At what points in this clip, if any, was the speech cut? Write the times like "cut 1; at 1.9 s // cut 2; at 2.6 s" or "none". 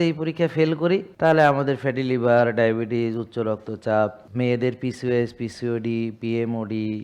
cut 1; at 1.1 s // cut 2; at 4.2 s